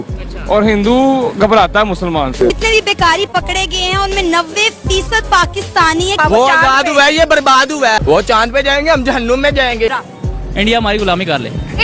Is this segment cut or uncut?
cut